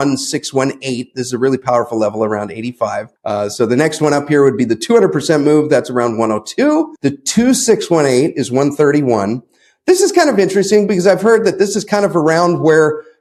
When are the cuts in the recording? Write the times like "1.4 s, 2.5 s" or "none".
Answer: none